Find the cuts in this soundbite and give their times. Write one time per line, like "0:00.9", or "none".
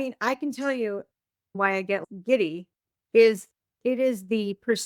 0:01.5